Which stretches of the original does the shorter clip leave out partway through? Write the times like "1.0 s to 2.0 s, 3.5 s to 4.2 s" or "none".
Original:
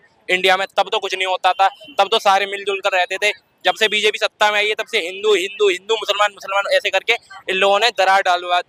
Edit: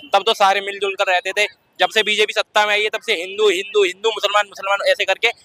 none